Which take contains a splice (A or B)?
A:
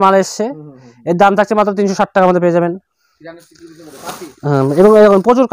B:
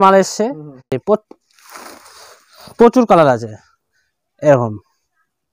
B